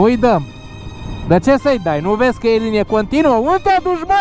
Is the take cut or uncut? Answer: uncut